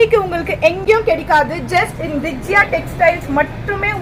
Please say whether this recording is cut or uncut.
uncut